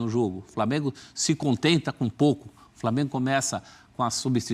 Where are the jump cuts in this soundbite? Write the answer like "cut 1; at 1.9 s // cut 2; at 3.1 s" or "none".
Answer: none